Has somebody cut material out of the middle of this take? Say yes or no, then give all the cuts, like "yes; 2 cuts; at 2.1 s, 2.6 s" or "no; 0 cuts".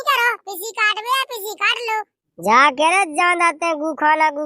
yes; 1 cut; at 2.2 s